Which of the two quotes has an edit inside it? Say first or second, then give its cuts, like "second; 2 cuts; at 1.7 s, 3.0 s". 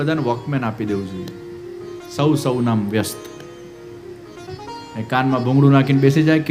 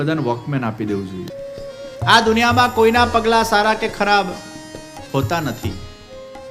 second; 1 cut; at 1.3 s